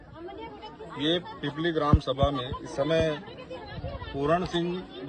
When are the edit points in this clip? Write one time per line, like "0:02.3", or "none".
none